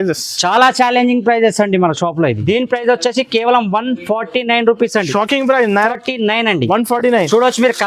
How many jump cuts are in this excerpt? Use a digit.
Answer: 2